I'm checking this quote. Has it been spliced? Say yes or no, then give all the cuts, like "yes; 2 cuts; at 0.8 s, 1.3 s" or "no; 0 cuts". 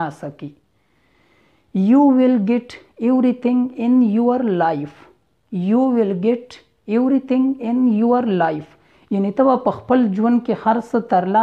no; 0 cuts